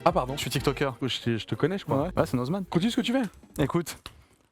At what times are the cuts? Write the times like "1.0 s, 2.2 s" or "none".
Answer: 1.0 s, 2.7 s

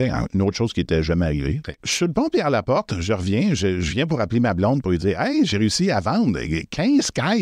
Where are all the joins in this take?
1.8 s

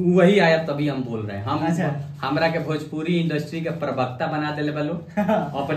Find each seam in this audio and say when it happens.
none

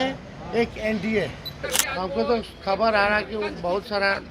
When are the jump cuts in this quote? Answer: 1.8 s

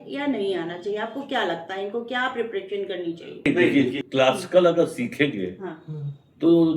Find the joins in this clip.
3.5 s

